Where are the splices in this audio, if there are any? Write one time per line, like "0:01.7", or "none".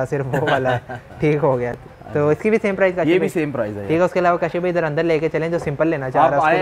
none